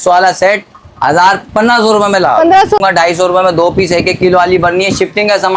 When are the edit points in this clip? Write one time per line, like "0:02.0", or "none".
0:02.8